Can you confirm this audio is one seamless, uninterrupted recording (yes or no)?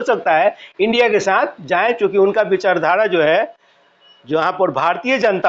yes